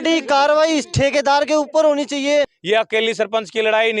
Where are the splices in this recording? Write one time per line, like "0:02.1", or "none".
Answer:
0:02.6